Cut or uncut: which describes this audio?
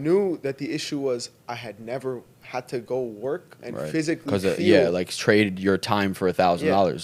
uncut